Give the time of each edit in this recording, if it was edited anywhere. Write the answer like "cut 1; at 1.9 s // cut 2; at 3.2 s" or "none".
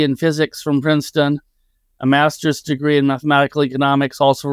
none